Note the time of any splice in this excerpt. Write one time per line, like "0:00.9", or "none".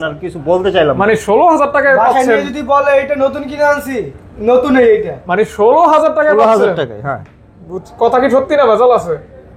none